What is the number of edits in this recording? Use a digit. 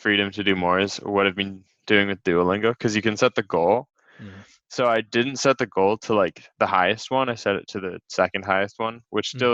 0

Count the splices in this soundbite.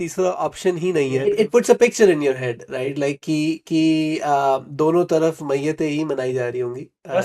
1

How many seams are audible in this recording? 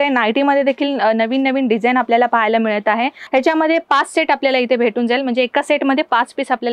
1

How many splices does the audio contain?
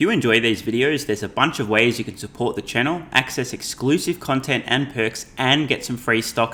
0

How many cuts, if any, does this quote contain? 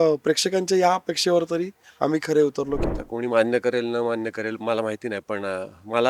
1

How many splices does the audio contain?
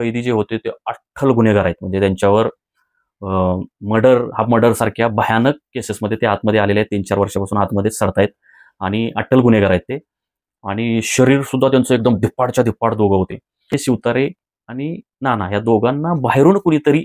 1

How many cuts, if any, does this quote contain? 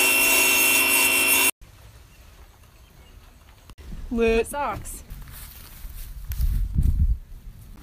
0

